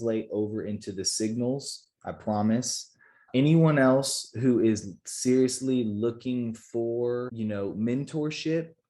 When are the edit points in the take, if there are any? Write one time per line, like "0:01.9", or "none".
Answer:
0:03.2
0:07.3